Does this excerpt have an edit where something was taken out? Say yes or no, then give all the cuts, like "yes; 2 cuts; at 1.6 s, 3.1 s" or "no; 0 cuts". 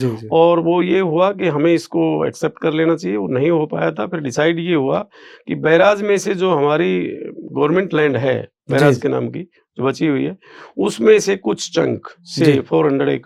no; 0 cuts